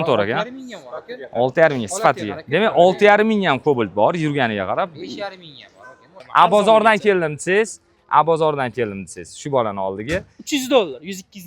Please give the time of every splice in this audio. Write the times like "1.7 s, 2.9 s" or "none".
6.1 s